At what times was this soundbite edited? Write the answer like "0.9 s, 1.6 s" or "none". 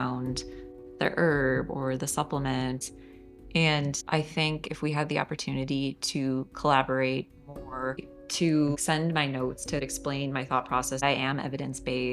2.8 s, 4.0 s, 8.1 s, 9.8 s, 11.0 s